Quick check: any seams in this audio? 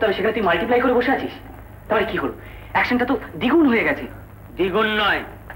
no; 0 cuts

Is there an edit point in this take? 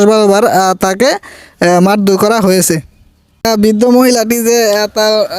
yes; 1 cut; at 3.4 s

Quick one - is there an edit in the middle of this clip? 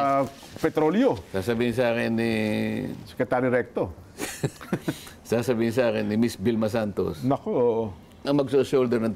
yes; 1 cut; at 8.2 s

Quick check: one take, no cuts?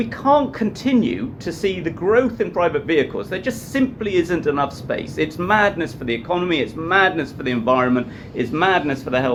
yes; 0 cuts

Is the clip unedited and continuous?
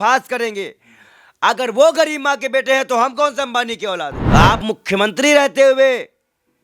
no; 1 cut; at 4.2 s

